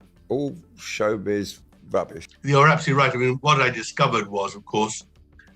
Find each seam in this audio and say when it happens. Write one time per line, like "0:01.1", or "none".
0:01.9

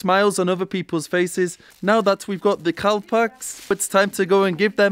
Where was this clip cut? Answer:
0:01.7

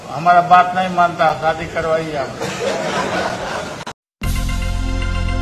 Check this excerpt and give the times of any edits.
0:04.0

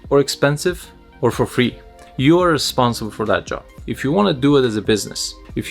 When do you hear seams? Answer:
0:03.7

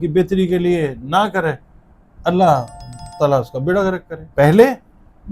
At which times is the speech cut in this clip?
0:04.1

